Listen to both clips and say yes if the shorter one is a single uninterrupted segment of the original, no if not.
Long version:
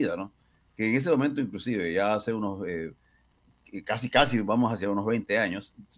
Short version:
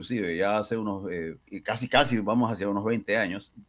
no